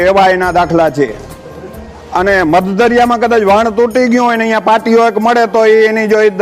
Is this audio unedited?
yes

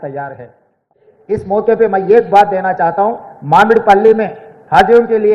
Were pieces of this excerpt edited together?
yes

